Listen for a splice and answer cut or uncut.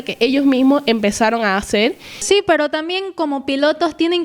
cut